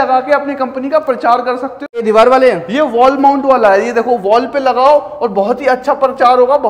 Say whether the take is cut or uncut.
cut